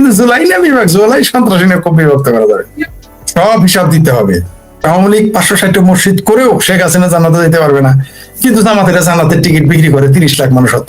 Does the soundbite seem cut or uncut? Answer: cut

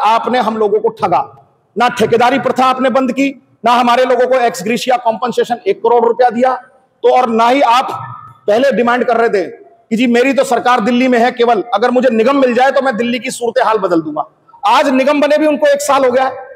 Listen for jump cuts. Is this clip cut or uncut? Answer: uncut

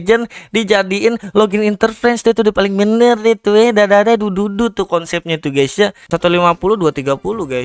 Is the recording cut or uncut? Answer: cut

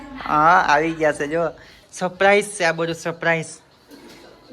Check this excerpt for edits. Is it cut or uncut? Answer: cut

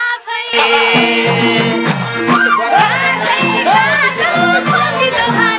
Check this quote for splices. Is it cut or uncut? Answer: uncut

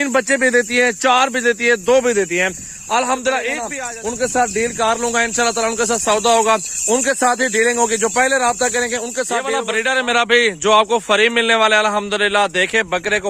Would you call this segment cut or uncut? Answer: cut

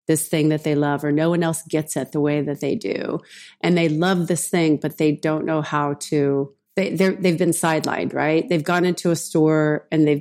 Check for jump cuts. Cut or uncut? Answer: cut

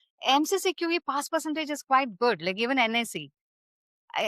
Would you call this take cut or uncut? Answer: uncut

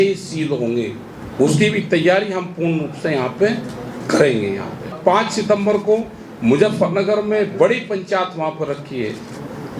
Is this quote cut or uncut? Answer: cut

